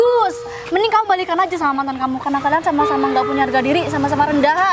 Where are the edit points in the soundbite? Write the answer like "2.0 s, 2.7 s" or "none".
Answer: none